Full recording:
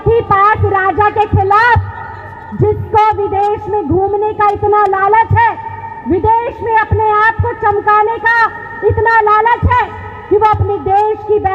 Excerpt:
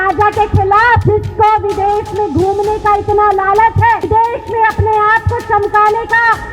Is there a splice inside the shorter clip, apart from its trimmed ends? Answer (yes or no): yes